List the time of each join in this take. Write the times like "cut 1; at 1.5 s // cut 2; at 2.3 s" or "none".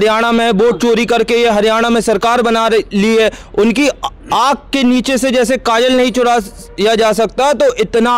none